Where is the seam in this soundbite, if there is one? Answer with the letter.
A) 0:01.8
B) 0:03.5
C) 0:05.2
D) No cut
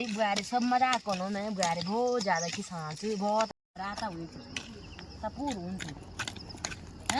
B